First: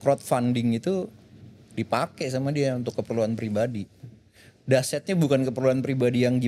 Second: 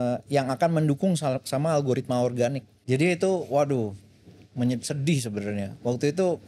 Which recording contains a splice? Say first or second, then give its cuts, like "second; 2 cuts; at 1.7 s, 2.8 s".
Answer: second; 1 cut; at 2.7 s